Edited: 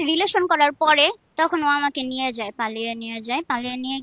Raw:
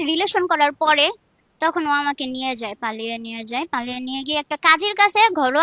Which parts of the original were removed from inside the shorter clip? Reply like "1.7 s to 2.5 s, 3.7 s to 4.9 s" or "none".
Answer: 1.2 s to 1.5 s